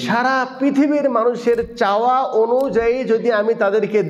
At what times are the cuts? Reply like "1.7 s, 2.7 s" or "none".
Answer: none